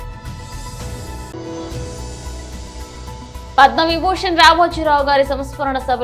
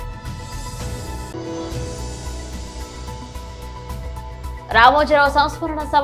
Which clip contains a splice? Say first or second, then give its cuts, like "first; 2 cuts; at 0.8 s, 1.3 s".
first; 2 cuts; at 1.3 s, 3.5 s